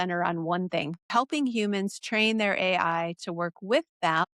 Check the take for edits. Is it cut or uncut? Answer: cut